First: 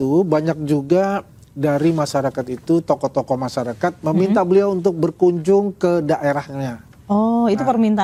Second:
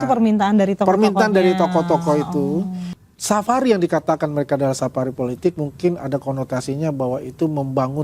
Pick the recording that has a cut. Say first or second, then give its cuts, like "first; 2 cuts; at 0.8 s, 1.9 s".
second; 1 cut; at 2.9 s